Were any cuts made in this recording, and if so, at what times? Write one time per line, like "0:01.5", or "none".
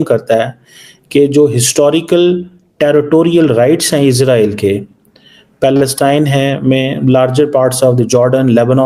none